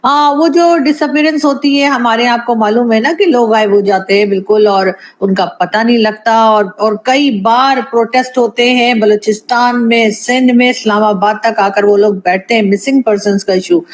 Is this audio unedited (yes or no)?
yes